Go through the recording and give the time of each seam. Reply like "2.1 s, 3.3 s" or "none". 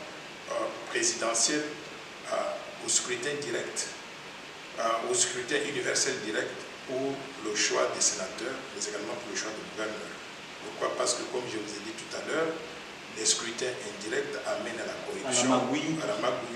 none